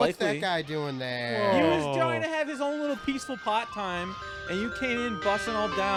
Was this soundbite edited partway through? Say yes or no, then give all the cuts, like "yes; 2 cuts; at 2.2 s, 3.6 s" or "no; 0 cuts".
no; 0 cuts